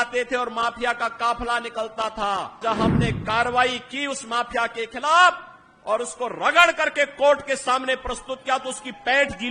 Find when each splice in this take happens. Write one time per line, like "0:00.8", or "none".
0:02.6